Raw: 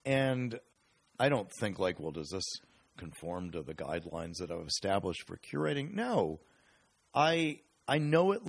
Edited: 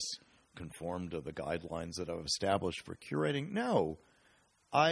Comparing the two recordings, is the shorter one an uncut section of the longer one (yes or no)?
yes